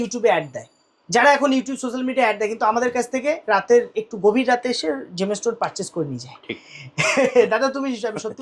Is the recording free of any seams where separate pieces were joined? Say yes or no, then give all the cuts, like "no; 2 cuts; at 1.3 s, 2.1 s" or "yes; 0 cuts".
yes; 0 cuts